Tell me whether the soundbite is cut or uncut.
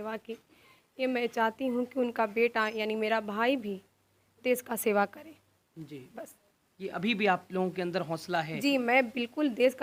uncut